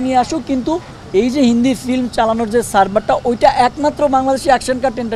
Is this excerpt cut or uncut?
uncut